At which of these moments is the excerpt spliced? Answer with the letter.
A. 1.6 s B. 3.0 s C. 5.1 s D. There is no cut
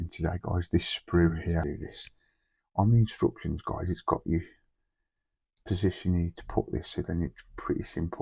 A